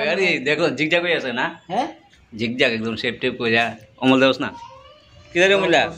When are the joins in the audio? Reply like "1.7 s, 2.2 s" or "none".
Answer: 4.8 s